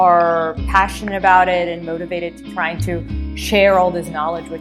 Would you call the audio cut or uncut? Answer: uncut